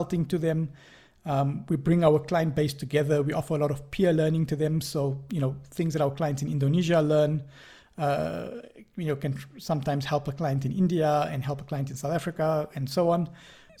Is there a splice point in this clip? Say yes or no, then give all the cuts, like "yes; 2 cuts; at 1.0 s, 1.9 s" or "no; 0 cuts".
no; 0 cuts